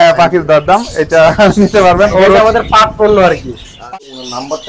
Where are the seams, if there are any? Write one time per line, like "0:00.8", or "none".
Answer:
0:03.7